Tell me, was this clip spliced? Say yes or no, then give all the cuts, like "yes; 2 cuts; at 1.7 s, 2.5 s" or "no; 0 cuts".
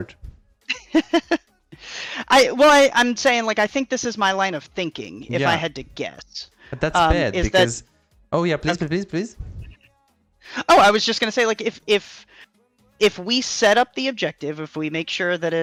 no; 0 cuts